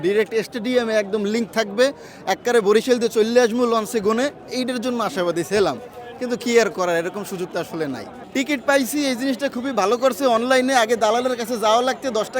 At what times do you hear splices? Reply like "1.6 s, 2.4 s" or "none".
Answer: none